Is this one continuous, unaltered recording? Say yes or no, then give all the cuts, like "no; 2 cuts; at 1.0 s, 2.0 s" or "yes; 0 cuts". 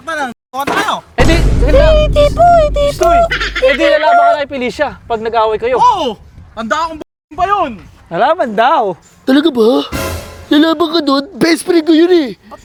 yes; 0 cuts